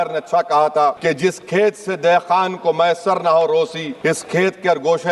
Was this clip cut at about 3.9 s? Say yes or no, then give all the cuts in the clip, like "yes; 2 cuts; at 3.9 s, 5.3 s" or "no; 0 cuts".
yes; 2 cuts; at 1.0 s, 3.9 s